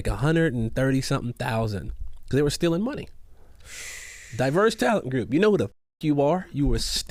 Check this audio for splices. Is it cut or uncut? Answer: uncut